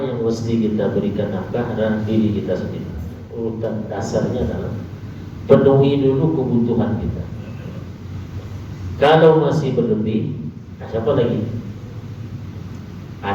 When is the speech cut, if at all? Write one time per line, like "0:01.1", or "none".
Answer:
0:03.2